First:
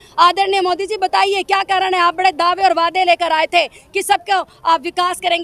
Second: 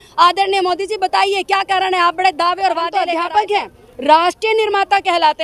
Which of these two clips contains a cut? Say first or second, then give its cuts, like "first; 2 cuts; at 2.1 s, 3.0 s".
second; 1 cut; at 3.0 s